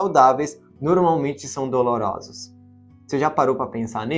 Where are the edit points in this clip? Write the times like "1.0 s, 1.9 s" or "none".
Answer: none

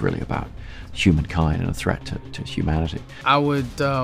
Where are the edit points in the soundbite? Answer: 3.1 s

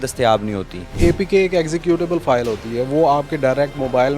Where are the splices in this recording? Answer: 0.9 s

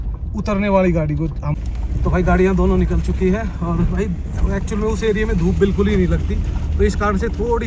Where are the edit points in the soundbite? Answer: 1.4 s

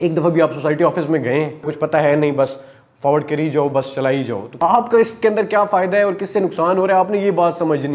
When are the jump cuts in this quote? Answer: 1.7 s, 4.5 s

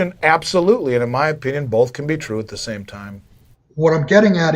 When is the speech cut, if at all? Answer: 3.5 s

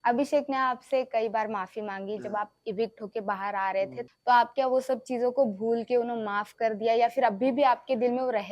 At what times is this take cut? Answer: 4.0 s

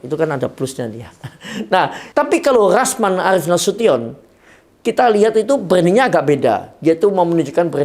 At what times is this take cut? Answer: 2.0 s

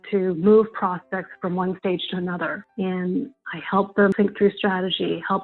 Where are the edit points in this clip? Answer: 2.6 s, 4.1 s

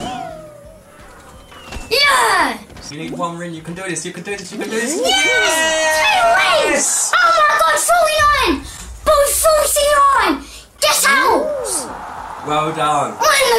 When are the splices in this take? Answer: 2.9 s

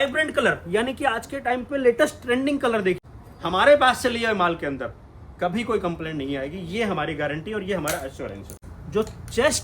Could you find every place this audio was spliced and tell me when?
3.0 s, 8.5 s

